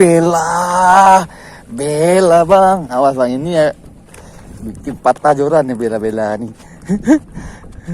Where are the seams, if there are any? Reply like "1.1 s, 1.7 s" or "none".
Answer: none